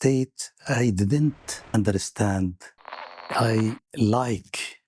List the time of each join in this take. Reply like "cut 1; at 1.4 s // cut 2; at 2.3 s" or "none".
cut 1; at 1.7 s // cut 2; at 3.3 s

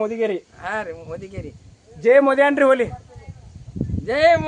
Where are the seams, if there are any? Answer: none

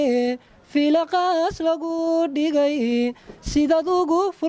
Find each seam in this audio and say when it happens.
none

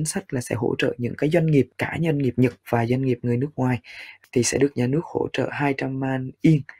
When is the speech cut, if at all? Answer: cut 1; at 4.2 s

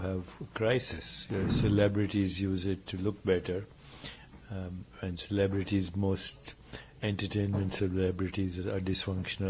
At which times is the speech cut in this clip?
cut 1; at 1.1 s

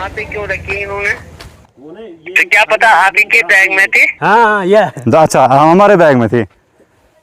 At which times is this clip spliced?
cut 1; at 1.6 s // cut 2; at 4.0 s

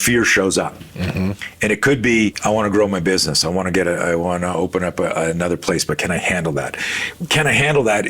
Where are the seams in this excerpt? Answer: cut 1; at 2.4 s

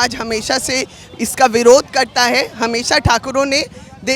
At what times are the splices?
none

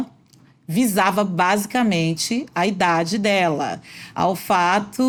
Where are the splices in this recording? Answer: none

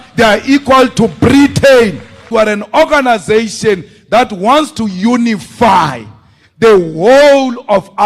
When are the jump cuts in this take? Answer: cut 1; at 2.3 s

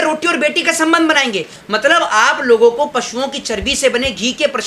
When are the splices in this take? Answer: cut 1; at 1.6 s

